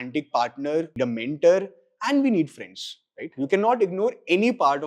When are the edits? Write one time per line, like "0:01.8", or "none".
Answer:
0:00.9